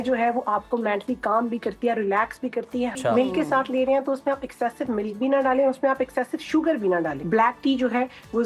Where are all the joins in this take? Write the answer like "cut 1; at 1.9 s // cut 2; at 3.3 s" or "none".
cut 1; at 2.9 s // cut 2; at 7.2 s